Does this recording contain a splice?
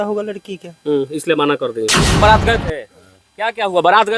yes; 1 cut; at 2.2 s

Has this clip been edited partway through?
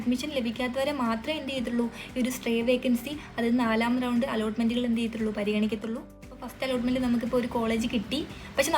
yes; 1 cut; at 6.3 s

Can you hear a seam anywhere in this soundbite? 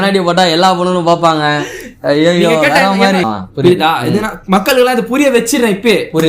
yes; 1 cut; at 3.3 s

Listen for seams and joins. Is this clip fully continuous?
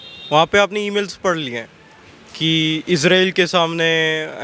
yes; 0 cuts

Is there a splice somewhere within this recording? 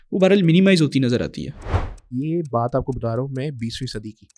yes; 1 cut; at 1.8 s

